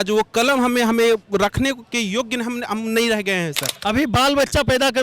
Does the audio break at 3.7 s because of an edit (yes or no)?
yes